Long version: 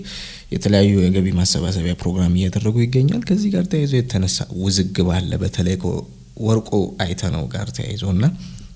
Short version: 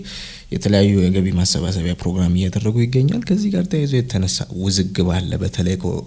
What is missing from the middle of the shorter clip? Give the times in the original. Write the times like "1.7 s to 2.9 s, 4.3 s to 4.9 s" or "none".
none

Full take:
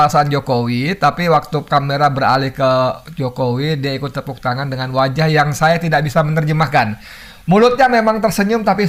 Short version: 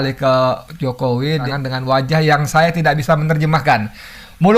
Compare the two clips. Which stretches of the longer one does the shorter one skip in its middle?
3.8 s to 4.5 s

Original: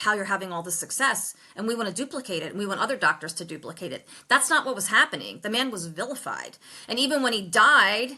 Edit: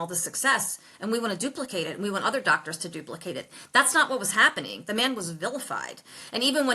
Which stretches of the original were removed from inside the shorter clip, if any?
none

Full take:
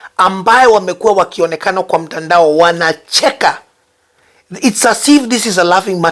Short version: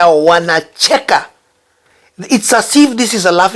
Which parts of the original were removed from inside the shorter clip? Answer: none

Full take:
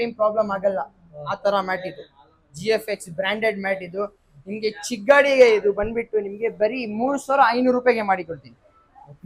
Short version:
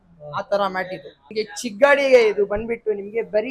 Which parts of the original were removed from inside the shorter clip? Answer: 2.1 s to 4.4 s

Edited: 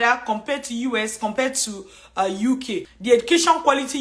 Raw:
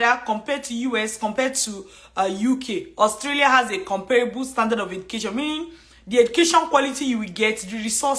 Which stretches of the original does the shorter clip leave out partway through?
2.9 s to 5.9 s

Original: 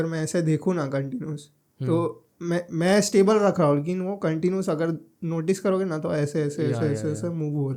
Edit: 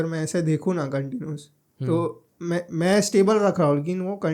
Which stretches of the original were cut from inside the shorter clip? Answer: none

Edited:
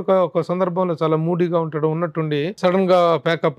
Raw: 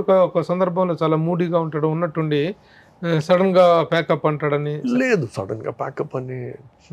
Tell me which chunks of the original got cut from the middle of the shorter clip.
2.6 s to 3.2 s

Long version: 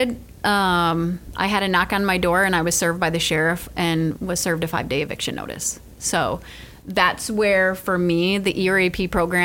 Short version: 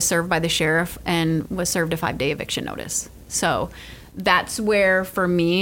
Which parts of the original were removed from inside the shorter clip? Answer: none

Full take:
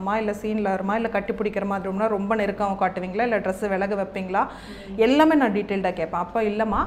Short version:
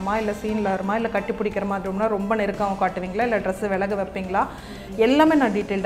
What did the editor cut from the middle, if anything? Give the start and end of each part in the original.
none

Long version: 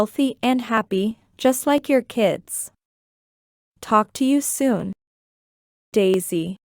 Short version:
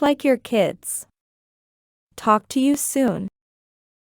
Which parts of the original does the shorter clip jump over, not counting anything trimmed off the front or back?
none

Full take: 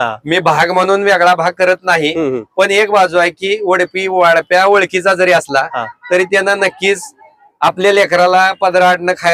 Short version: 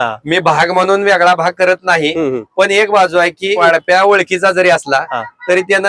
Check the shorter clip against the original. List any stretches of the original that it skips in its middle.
3.6 s to 4.2 s

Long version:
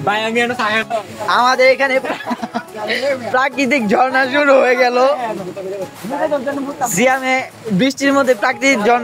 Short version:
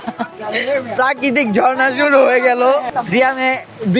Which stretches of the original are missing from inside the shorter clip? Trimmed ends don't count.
5.2 s to 6.7 s

